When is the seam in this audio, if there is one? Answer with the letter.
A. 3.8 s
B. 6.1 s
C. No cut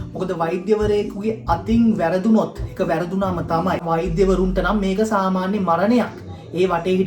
A